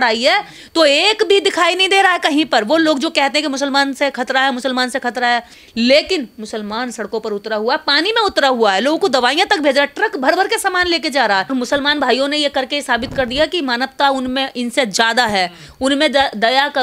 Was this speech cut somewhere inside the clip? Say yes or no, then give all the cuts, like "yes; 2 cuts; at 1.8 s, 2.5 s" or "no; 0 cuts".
yes; 2 cuts; at 5.6 s, 11.5 s